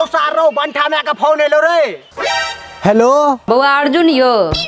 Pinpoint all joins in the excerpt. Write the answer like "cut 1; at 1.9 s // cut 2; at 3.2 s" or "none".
none